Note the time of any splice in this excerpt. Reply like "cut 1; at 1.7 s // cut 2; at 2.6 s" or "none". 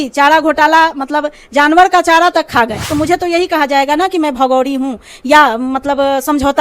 cut 1; at 2.8 s